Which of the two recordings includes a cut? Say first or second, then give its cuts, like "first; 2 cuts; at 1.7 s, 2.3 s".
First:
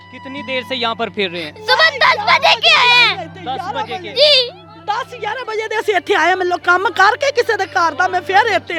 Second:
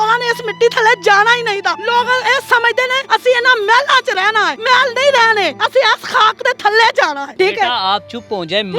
second; 5 cuts; at 1.8 s, 3.0 s, 4.5 s, 5.6 s, 7.3 s